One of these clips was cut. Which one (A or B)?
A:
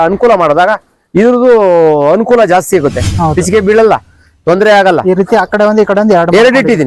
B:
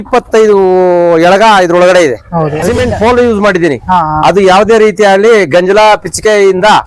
B